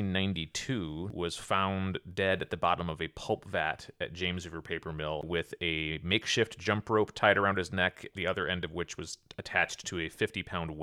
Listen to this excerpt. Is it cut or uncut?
cut